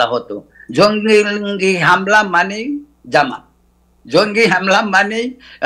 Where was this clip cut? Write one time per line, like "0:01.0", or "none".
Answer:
none